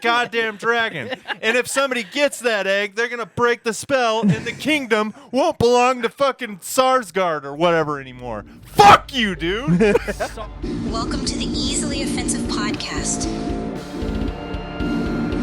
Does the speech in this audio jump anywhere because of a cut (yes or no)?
yes